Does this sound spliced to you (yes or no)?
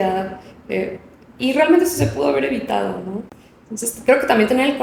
no